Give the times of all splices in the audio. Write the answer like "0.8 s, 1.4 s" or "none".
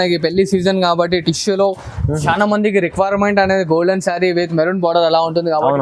none